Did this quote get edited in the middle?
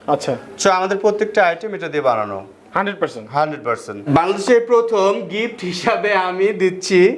yes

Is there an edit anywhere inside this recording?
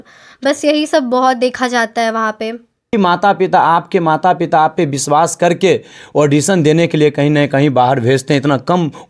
yes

